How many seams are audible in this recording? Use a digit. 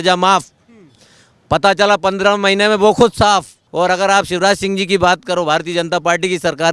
1